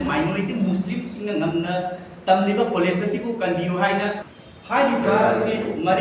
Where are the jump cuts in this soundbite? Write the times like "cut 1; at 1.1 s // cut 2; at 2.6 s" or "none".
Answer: cut 1; at 4.3 s